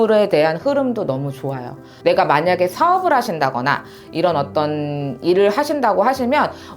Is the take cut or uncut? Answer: cut